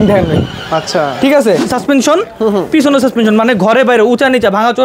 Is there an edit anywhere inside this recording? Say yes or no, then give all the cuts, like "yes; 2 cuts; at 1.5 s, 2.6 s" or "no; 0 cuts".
yes; 1 cut; at 1.7 s